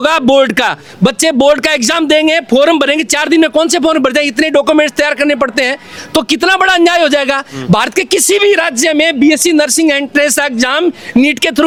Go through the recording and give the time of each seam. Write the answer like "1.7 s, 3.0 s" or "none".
none